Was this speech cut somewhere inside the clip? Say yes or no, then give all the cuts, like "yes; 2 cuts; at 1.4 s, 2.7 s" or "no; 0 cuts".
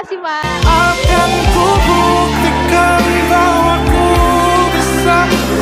no; 0 cuts